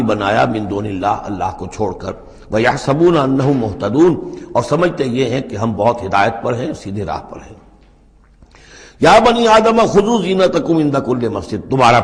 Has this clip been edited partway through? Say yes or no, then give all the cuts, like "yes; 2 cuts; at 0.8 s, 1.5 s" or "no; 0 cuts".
no; 0 cuts